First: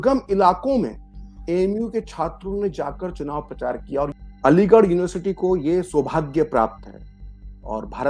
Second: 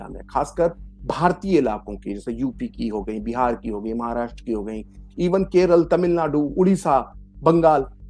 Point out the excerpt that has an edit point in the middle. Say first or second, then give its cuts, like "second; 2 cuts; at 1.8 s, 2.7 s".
first; 1 cut; at 4.1 s